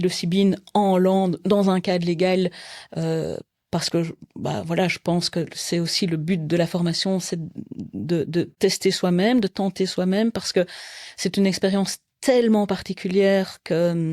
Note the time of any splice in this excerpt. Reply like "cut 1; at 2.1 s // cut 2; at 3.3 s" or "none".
cut 1; at 8.5 s

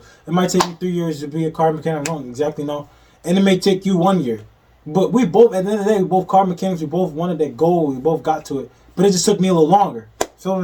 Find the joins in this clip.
none

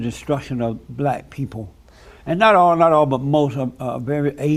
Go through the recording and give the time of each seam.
none

